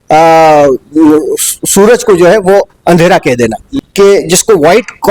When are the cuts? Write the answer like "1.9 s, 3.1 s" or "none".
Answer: 3.7 s